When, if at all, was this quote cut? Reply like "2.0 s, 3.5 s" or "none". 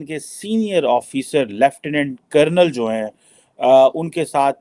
none